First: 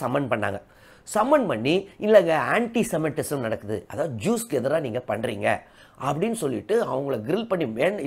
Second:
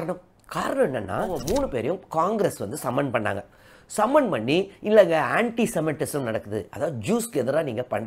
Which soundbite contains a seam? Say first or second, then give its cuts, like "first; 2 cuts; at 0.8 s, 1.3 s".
second; 1 cut; at 1.4 s